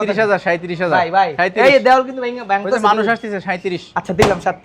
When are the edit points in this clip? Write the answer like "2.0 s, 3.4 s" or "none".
1.3 s